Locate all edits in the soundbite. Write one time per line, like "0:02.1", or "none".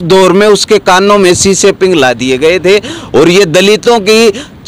none